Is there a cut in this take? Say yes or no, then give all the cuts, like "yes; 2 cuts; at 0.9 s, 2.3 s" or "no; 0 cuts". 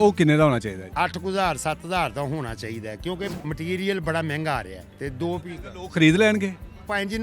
yes; 2 cuts; at 0.8 s, 3.4 s